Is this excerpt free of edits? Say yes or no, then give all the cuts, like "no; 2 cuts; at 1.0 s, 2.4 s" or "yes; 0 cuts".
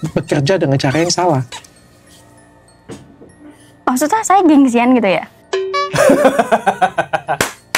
yes; 0 cuts